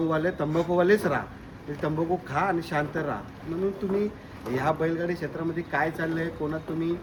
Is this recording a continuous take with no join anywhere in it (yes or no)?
yes